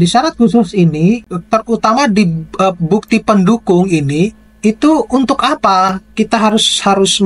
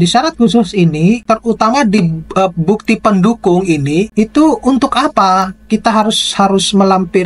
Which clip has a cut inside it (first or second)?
second